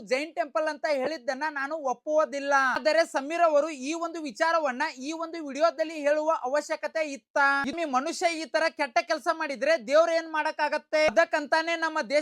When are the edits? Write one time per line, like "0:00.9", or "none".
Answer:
0:02.8
0:07.7
0:11.1